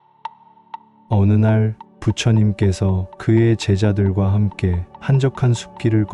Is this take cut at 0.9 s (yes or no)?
yes